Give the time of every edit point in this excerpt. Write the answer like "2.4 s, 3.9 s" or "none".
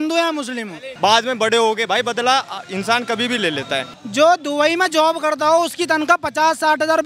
0.9 s, 4.0 s